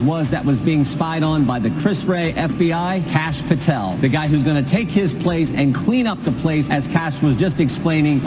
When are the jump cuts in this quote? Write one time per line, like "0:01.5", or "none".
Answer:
none